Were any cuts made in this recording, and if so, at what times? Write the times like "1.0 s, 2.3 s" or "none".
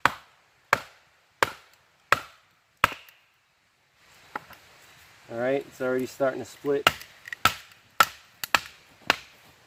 none

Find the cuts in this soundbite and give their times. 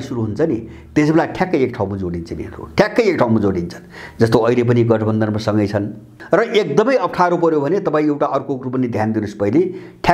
6.1 s

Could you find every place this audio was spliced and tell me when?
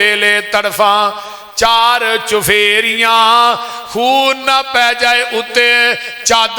none

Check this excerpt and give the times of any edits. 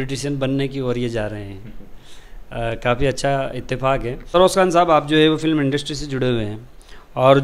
none

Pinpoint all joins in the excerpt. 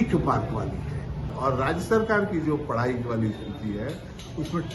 1.3 s

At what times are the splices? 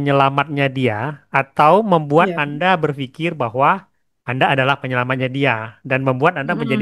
none

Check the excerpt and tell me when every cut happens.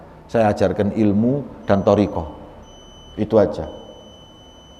none

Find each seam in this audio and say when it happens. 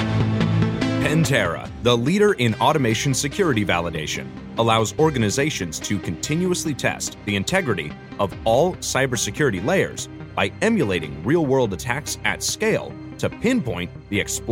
1.1 s

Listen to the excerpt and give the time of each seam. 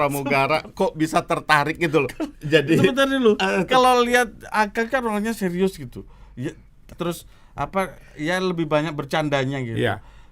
6.9 s

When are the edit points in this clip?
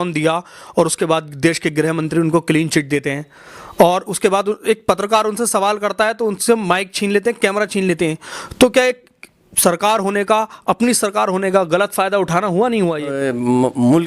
13.1 s

